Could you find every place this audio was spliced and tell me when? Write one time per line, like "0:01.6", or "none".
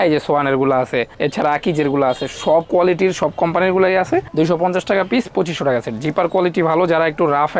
0:04.3